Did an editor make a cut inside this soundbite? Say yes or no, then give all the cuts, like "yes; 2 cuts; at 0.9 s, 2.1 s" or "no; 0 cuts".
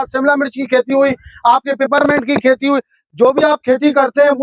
no; 0 cuts